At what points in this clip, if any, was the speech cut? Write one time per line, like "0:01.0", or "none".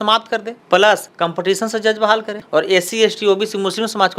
0:01.1
0:02.4